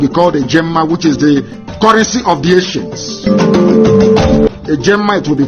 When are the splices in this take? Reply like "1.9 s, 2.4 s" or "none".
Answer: 2.7 s